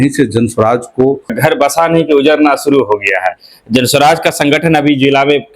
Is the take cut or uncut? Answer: cut